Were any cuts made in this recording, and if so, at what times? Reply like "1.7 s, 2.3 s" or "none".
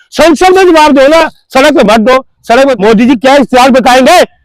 2.8 s